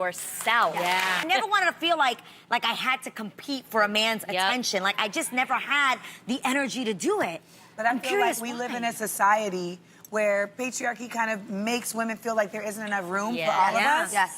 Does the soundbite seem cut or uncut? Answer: uncut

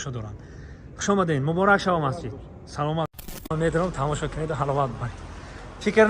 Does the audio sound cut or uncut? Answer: cut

